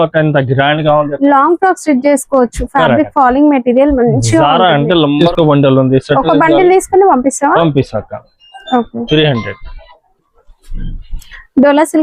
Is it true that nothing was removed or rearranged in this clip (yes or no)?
no